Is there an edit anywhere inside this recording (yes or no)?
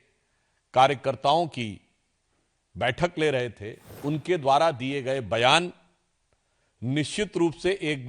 yes